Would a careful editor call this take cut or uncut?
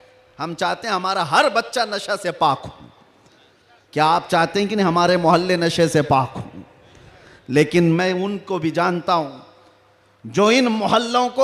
uncut